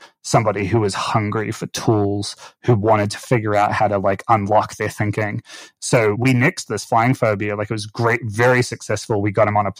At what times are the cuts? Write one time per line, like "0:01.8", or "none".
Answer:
0:06.2